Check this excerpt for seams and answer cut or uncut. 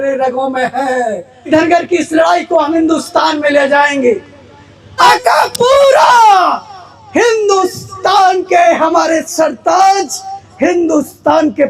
cut